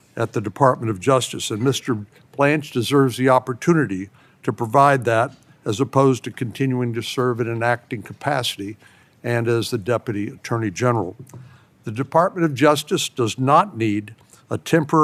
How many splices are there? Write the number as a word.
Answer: zero